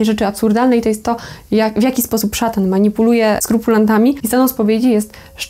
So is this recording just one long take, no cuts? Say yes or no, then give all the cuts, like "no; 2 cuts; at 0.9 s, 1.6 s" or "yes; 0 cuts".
no; 2 cuts; at 3.4 s, 4.2 s